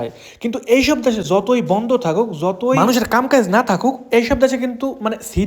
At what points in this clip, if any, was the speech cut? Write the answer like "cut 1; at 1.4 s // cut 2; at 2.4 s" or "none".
none